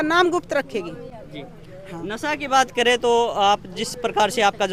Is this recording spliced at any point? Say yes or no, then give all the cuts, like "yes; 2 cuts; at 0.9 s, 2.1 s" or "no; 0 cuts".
no; 0 cuts